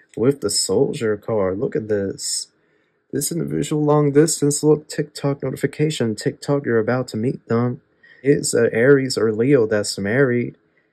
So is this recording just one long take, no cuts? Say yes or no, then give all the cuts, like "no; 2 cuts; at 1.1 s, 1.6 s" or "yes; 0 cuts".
no; 1 cut; at 8.2 s